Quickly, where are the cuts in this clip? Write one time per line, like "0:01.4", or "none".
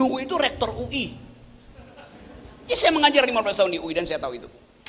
none